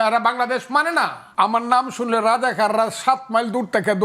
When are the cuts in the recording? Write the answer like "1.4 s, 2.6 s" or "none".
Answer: 1.2 s